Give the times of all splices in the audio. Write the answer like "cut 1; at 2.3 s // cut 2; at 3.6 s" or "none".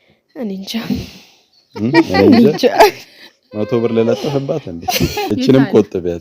cut 1; at 5.3 s